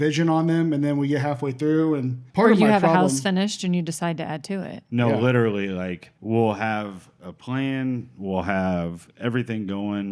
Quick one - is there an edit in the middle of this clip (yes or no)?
yes